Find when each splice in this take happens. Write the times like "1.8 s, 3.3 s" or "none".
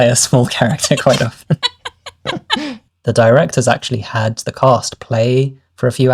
2.9 s, 4.3 s